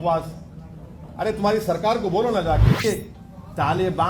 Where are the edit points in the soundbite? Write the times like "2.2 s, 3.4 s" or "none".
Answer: 2.8 s

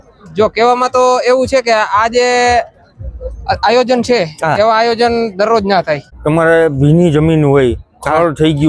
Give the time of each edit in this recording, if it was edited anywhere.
6.0 s

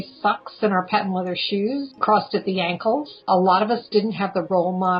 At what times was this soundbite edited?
1.9 s, 3.3 s

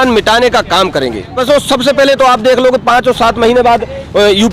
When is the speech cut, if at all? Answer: 1.4 s

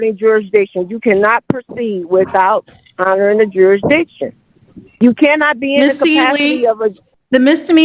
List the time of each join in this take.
none

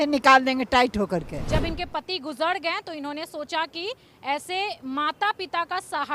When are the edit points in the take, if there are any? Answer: 1.4 s

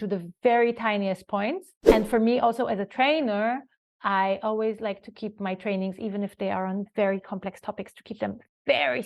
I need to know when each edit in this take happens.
1.7 s

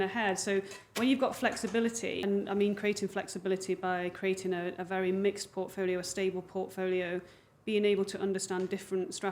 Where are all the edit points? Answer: 2.2 s

